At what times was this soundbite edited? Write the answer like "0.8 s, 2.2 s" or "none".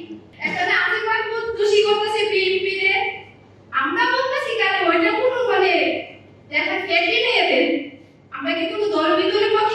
none